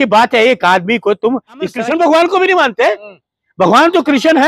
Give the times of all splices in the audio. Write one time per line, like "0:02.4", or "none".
0:01.7